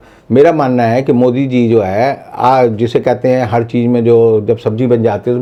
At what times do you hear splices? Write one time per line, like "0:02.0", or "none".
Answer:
none